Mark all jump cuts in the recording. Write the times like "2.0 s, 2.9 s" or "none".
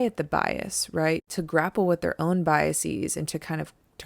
1.3 s